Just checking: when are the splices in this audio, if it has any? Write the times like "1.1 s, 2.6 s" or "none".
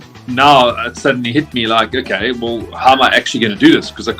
none